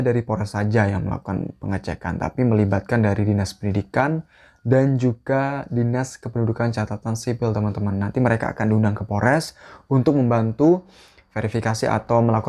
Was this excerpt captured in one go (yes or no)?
yes